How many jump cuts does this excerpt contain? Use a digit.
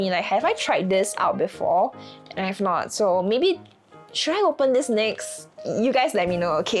0